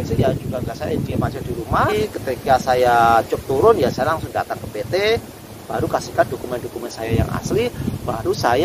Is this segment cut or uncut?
cut